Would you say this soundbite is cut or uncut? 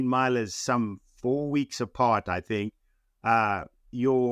uncut